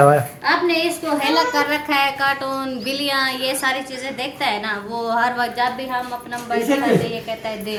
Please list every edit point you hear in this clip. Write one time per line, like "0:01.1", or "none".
none